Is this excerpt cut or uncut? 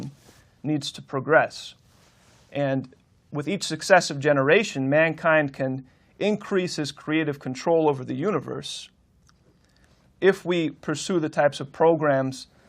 cut